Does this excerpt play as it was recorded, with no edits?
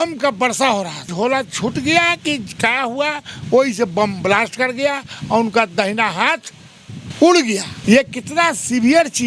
no; 2 cuts; at 1.1 s, 7.7 s

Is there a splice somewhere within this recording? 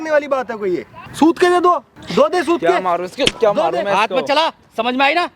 yes; 2 cuts; at 1.0 s, 2.0 s

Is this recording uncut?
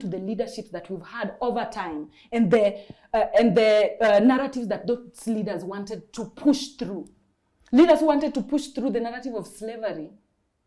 yes; 0 cuts

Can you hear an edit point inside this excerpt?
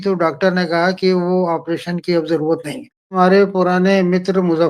yes; 1 cut; at 3.3 s

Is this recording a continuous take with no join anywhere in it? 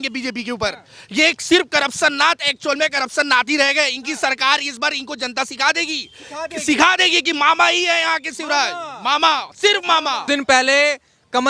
no; 1 cut; at 10.2 s

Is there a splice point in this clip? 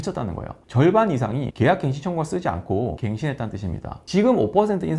yes; 3 cuts; at 1.5 s, 3.0 s, 4.0 s

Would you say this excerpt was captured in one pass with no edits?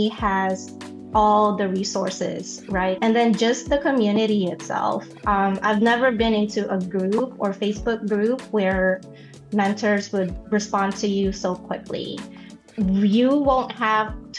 no; 2 cuts; at 3.0 s, 12.6 s

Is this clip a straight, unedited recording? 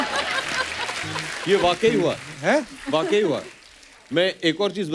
yes; 0 cuts

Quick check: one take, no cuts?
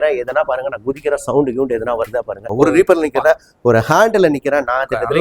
no; 1 cut; at 2.4 s

